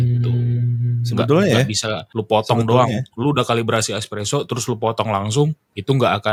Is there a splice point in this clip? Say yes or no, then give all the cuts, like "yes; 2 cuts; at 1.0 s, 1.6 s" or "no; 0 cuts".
no; 0 cuts